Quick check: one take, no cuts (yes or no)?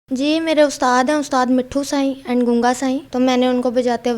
no